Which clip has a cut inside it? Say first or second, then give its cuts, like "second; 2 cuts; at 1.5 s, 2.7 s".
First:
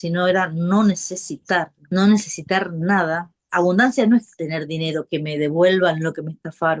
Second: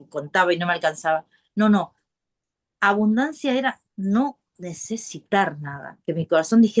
first; 2 cuts; at 1.8 s, 3.4 s